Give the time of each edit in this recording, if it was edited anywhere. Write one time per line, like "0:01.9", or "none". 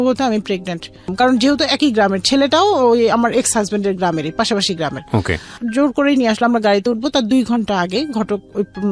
0:01.1